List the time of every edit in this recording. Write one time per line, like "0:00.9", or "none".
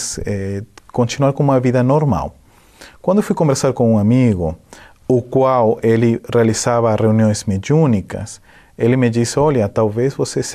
0:04.5